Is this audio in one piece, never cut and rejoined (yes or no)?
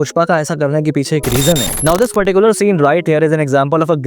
no